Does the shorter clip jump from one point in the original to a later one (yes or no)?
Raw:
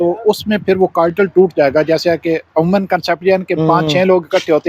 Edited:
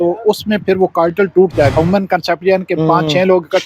yes